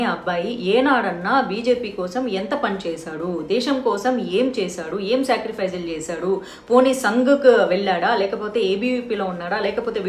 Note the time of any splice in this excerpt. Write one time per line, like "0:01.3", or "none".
none